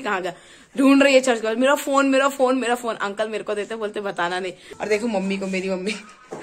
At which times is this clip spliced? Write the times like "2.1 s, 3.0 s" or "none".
4.7 s